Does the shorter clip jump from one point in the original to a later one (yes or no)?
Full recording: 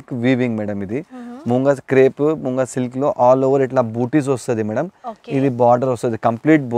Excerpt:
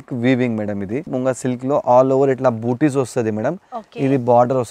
yes